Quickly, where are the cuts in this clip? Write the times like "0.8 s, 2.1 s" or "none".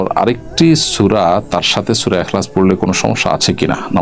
none